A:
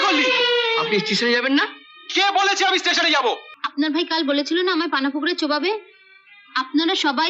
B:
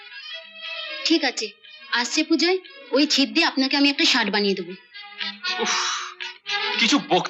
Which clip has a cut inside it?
A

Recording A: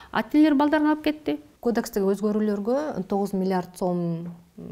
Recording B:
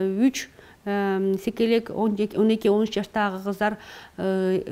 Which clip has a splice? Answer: A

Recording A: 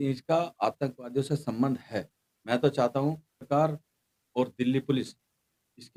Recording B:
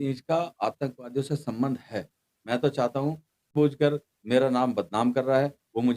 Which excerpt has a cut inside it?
B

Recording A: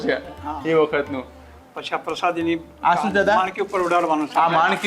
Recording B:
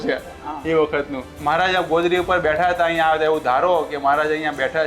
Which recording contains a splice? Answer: B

